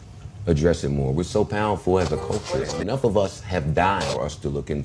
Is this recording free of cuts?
no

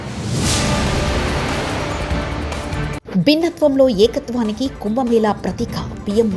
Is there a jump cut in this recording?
no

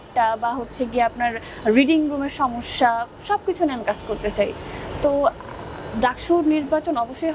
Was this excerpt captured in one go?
yes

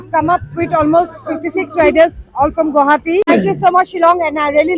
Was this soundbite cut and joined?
yes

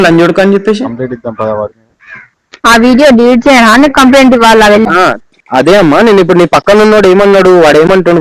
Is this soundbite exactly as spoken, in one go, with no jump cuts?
no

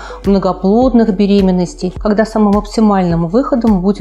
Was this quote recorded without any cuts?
no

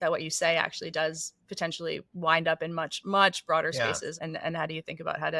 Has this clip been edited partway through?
yes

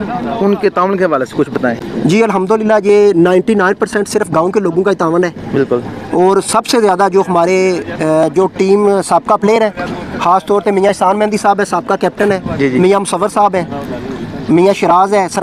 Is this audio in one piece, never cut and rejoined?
yes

